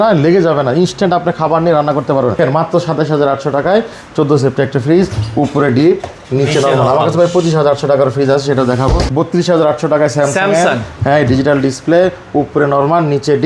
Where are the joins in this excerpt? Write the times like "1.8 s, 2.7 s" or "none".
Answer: 2.4 s, 9.1 s